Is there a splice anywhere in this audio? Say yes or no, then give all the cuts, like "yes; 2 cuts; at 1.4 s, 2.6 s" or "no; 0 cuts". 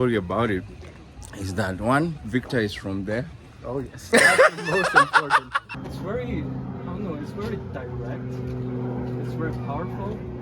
yes; 1 cut; at 5.7 s